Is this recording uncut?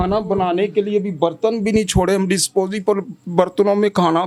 yes; 0 cuts

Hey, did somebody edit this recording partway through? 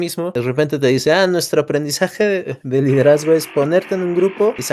no; 0 cuts

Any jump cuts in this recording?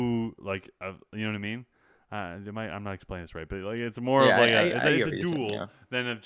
no; 0 cuts

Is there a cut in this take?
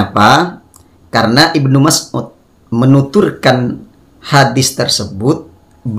no; 0 cuts

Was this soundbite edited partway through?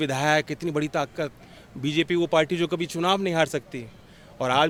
no; 0 cuts

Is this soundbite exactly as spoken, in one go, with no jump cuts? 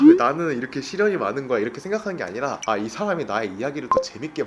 yes; 0 cuts

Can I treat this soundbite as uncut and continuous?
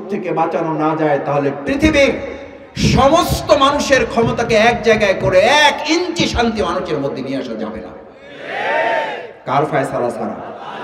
yes; 0 cuts

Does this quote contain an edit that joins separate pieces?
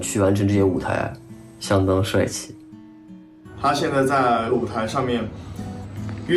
no; 0 cuts

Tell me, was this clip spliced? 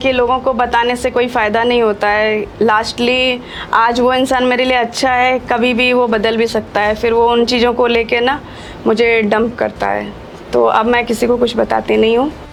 no; 0 cuts

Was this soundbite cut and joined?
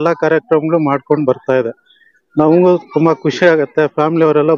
no; 0 cuts

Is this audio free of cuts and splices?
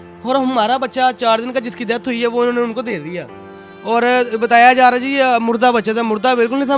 yes; 0 cuts

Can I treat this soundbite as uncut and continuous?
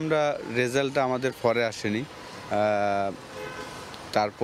yes; 0 cuts

